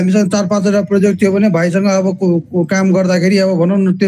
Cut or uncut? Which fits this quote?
uncut